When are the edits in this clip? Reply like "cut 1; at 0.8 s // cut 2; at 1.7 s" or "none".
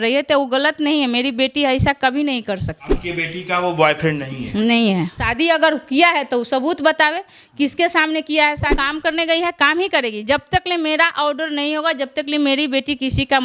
cut 1; at 3.0 s // cut 2; at 5.3 s // cut 3; at 8.9 s